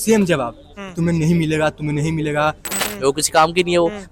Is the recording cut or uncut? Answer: cut